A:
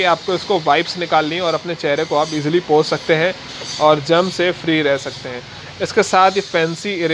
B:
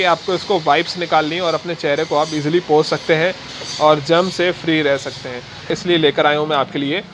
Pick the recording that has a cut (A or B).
B